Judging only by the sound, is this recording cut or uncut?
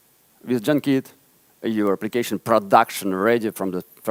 uncut